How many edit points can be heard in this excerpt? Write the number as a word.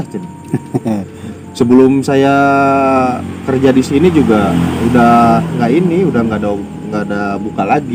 zero